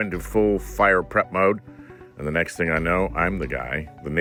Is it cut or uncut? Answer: uncut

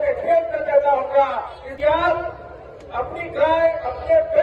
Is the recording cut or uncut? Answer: cut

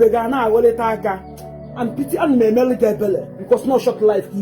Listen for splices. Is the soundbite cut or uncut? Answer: cut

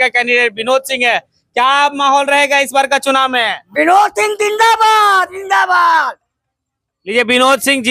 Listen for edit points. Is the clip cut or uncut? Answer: uncut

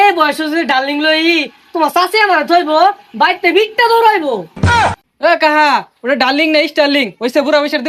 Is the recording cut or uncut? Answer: uncut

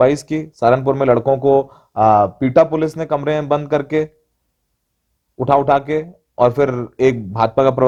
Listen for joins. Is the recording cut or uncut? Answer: uncut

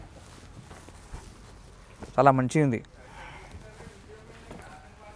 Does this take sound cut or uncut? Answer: uncut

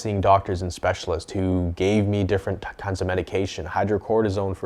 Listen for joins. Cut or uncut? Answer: uncut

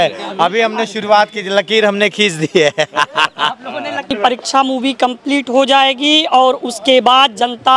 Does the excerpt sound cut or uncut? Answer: cut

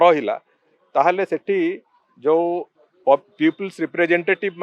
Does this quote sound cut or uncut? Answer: uncut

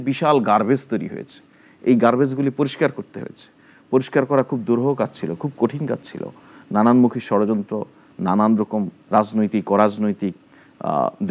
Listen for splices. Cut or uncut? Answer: uncut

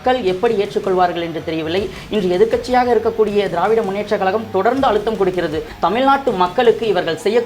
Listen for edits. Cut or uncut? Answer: cut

